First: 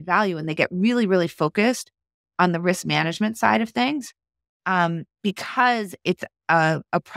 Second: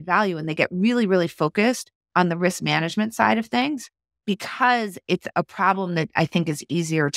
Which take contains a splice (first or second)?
second